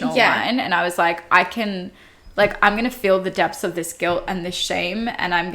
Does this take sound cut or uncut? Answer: uncut